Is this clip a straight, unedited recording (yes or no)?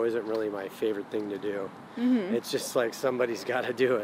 yes